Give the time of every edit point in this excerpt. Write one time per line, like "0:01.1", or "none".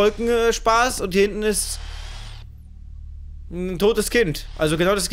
none

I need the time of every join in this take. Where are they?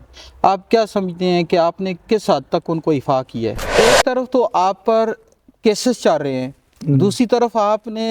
0:03.6

